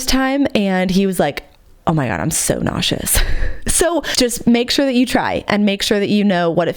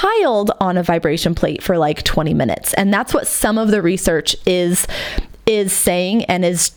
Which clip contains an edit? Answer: first; 1 cut; at 4.1 s

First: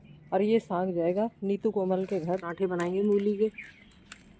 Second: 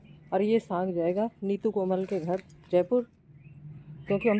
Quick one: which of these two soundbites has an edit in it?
first; 1 cut; at 2.6 s

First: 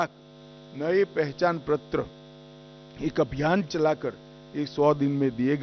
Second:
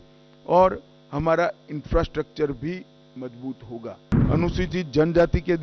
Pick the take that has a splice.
second; 1 cut; at 4.2 s

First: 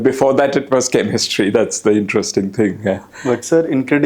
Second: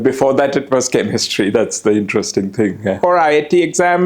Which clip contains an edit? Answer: second; 1 cut; at 3.0 s

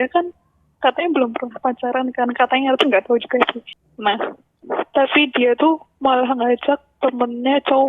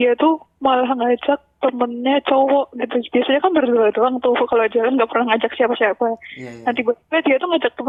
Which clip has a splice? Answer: first; 1 cut; at 3.7 s

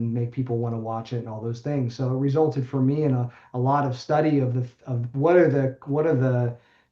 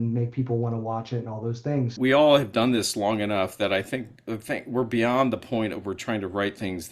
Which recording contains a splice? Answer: second; 1 cut; at 1.9 s

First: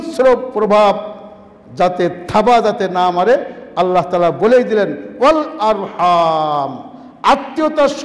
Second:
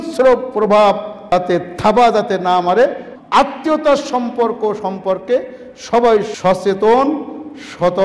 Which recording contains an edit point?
second; 3 cuts; at 1.1 s, 3.1 s, 6.3 s

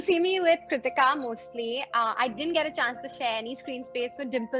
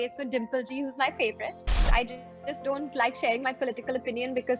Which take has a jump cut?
second; 1 cut; at 1.7 s

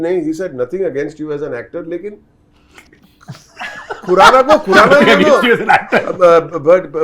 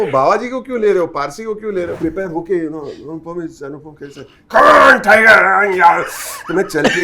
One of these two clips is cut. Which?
second; 1 cut; at 1.9 s

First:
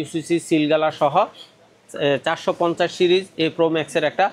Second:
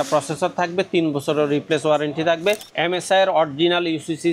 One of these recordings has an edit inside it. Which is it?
second; 1 cut; at 2.7 s

